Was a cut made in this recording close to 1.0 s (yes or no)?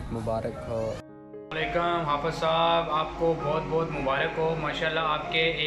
yes